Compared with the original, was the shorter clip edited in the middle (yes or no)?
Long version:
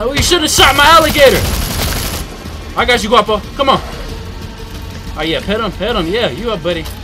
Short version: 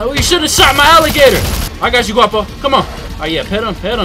yes